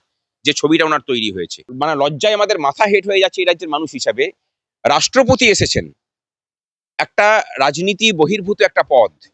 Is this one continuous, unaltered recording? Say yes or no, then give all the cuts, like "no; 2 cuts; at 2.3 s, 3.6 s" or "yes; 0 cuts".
no; 1 cut; at 1.6 s